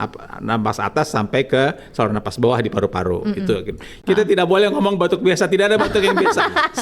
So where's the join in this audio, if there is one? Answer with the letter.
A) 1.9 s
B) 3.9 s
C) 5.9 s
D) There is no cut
B